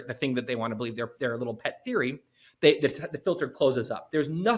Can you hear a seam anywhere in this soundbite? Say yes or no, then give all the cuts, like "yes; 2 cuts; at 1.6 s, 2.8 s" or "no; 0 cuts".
no; 0 cuts